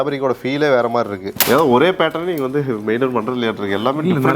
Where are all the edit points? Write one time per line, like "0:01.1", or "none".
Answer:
0:01.3